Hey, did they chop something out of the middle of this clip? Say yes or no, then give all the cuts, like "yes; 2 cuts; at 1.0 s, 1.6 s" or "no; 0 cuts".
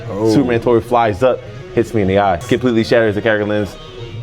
yes; 1 cut; at 2.4 s